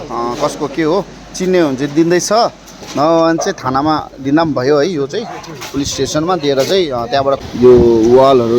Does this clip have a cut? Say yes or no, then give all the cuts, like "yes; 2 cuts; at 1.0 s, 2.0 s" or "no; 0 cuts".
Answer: yes; 1 cut; at 7.4 s